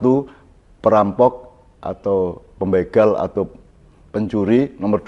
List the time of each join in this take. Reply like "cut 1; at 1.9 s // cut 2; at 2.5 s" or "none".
none